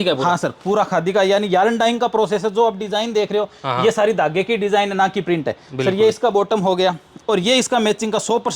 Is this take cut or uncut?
uncut